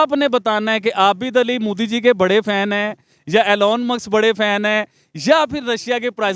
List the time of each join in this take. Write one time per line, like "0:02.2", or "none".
none